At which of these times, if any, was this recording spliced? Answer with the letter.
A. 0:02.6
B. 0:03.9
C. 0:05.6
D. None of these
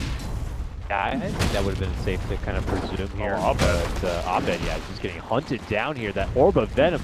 D